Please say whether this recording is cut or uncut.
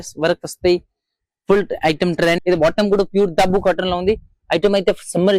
cut